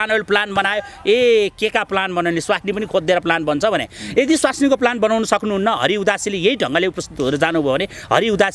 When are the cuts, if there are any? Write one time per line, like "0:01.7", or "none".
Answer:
none